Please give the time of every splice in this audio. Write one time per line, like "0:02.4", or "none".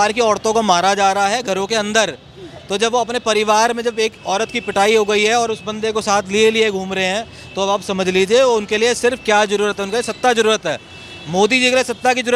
none